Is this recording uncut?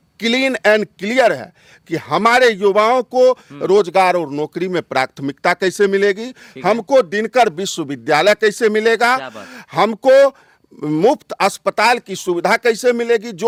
yes; 0 cuts

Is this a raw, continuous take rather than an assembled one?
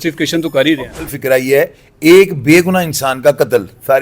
no; 1 cut; at 1.0 s

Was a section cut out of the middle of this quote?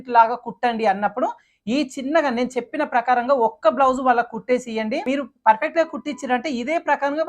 yes; 1 cut; at 5.1 s

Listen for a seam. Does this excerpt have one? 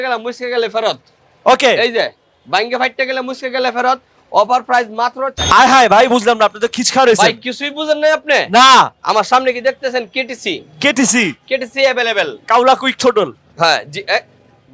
yes; 2 cuts; at 5.3 s, 12.4 s

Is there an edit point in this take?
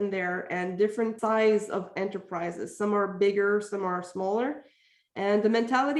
yes; 1 cut; at 1.2 s

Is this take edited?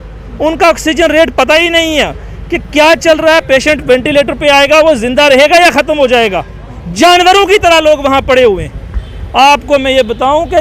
no; 0 cuts

